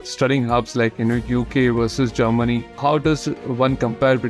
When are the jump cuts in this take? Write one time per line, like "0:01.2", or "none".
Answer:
0:02.8